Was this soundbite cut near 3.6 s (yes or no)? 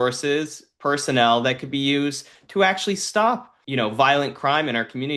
yes